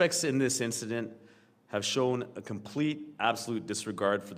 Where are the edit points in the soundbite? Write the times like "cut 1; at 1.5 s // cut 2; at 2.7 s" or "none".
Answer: none